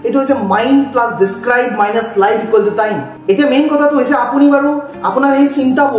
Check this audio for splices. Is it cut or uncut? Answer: cut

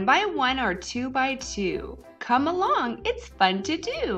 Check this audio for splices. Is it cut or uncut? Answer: cut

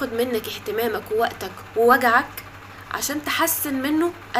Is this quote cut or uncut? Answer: uncut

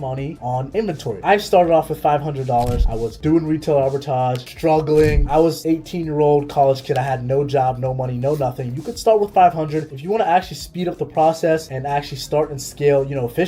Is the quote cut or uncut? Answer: cut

